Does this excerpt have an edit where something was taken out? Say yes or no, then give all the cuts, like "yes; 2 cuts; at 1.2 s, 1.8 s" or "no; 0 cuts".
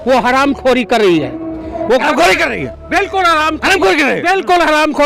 no; 0 cuts